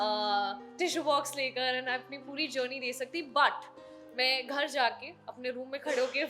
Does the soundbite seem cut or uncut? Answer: uncut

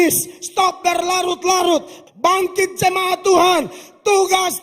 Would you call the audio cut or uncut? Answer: cut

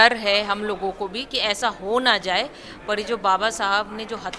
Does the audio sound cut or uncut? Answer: uncut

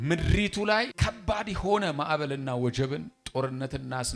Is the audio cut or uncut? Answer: cut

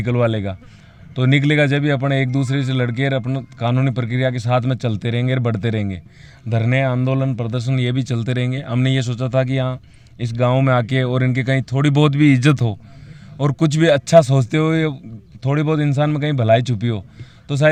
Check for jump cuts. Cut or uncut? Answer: uncut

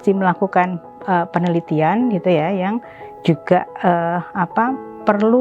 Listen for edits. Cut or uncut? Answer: uncut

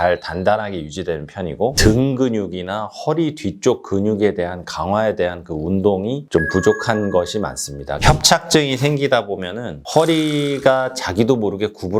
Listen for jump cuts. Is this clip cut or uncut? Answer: cut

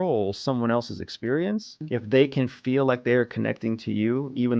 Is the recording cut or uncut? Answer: cut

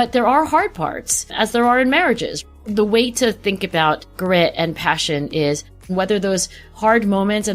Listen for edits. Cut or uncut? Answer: cut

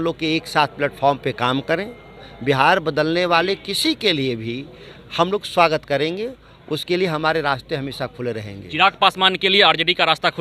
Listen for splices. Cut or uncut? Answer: uncut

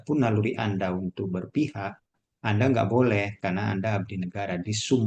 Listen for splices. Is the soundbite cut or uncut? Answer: uncut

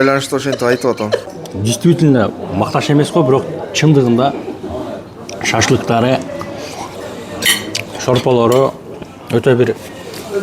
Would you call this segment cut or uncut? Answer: cut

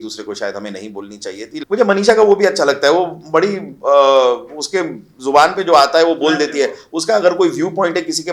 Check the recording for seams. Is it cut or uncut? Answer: cut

